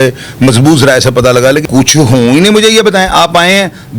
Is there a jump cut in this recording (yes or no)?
yes